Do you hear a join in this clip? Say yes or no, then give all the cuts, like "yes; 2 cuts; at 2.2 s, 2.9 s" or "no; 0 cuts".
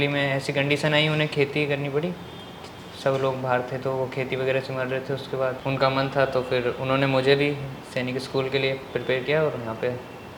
no; 0 cuts